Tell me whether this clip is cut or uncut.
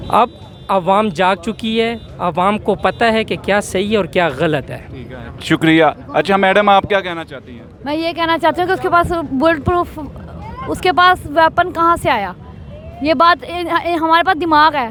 uncut